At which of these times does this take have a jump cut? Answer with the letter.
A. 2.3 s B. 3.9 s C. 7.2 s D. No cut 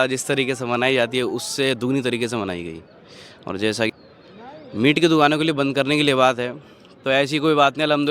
B